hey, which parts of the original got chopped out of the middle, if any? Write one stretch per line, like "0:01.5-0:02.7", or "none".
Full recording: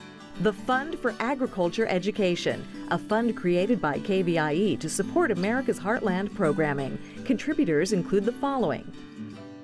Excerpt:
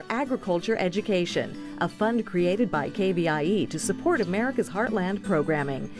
none

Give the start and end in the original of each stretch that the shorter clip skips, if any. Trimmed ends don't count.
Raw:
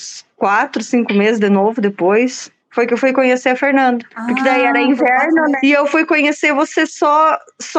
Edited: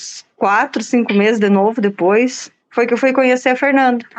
none

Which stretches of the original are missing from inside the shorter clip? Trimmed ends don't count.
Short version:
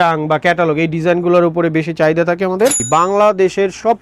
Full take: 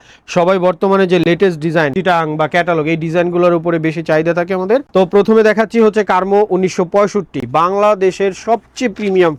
0:04.9-0:07.4

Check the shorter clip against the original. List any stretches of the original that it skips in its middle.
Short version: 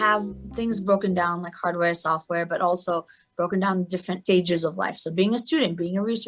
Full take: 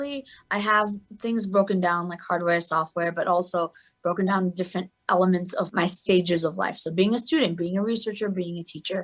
0:04.8-0:06.0

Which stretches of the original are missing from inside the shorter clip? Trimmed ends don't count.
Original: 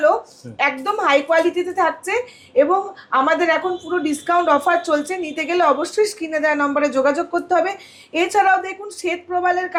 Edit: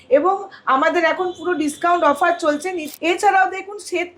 0:05.3-0:07.9

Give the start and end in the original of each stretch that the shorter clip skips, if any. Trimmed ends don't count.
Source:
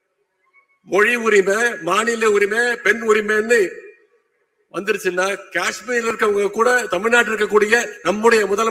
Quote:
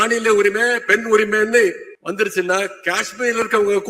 0:03.9-0:04.6

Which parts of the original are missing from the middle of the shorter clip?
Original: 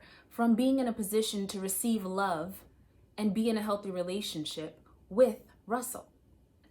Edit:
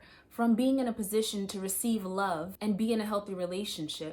0:02.5-0:03.1

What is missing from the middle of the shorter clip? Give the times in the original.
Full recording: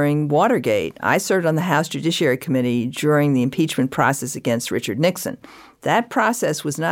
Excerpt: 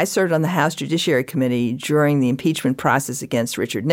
none

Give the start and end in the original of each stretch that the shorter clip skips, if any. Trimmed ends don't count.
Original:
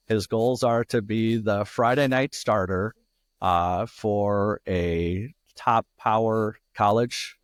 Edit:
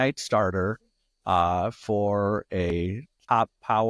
0:04.9-0:05.1

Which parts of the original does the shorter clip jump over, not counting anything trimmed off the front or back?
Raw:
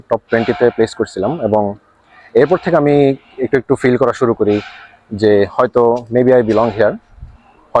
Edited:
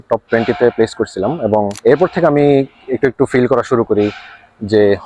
0:01.7-0:02.2

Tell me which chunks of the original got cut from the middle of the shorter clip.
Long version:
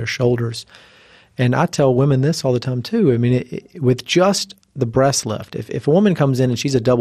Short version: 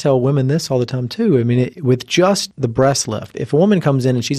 0:03.5-0:03.7
0:04.8-0:05.2

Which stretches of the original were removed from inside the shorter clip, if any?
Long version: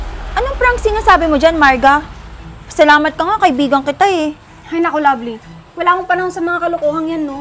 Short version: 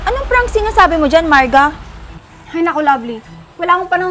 0:02.6-0:04.4

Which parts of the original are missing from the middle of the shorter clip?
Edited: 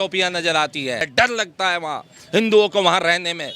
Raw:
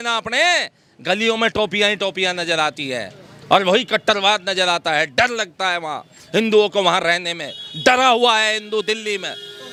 0:03.1-0:05.1

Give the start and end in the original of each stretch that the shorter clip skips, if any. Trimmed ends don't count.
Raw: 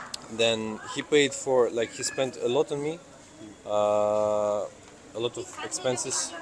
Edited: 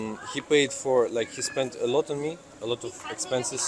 0:03.1-0:05.0

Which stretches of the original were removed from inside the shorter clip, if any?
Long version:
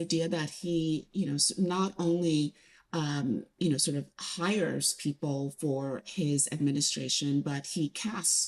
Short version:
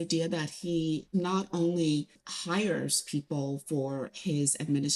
0:01.0-0:01.5
0:02.7-0:04.2

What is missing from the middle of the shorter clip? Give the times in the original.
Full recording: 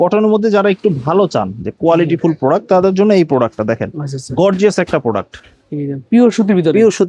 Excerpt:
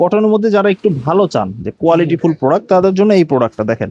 none

